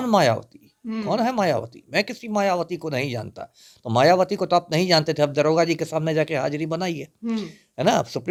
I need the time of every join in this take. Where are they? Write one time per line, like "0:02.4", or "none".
none